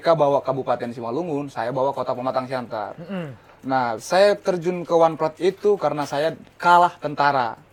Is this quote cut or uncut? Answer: uncut